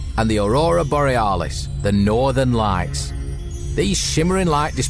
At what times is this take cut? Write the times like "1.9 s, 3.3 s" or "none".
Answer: none